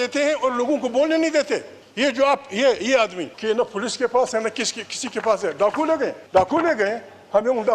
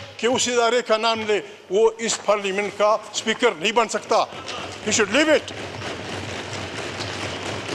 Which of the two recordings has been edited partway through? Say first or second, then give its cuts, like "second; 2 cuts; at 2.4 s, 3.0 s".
first; 3 cuts; at 1.8 s, 3.3 s, 6.2 s